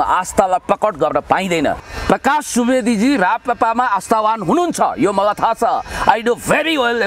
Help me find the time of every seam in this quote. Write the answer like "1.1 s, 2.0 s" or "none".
1.9 s